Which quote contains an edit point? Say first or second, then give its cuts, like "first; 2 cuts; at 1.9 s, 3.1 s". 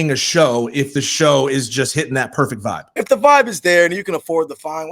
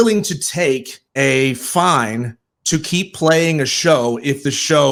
first; 1 cut; at 3.0 s